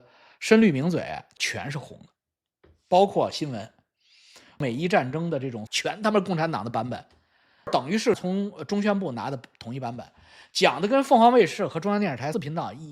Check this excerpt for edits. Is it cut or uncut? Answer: cut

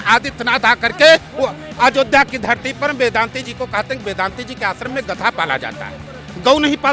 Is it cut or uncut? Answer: uncut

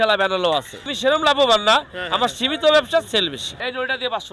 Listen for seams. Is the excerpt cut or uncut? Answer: cut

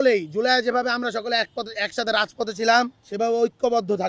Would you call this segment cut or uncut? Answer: uncut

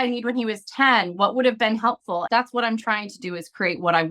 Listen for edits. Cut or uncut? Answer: cut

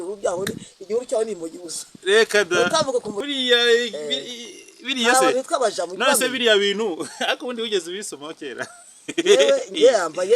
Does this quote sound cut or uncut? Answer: cut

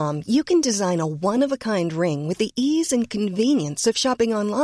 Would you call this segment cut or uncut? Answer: uncut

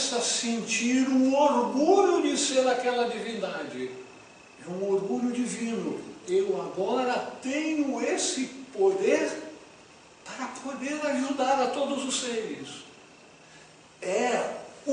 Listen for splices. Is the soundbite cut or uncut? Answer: cut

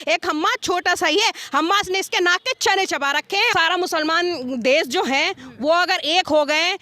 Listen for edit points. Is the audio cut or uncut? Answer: cut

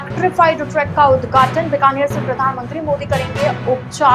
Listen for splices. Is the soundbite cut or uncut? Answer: uncut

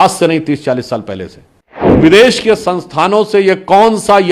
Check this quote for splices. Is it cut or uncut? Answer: cut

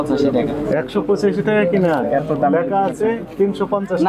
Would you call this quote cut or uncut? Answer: uncut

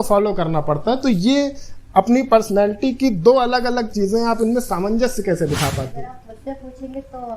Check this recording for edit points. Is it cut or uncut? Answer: cut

